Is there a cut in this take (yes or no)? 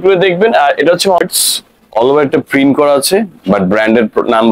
yes